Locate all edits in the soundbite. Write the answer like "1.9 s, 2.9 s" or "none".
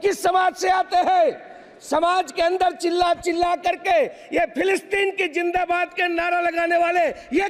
none